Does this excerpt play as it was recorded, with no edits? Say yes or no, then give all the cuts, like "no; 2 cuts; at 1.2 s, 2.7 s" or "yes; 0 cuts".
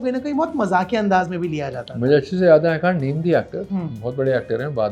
yes; 0 cuts